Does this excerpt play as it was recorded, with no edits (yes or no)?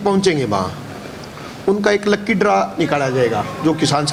yes